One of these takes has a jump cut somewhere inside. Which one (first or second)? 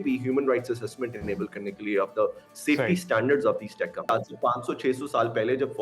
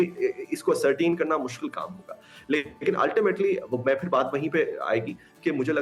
first